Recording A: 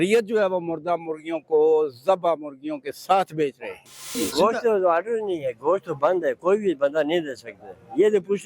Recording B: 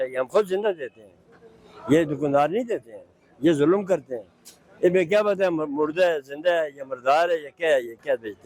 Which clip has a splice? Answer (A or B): A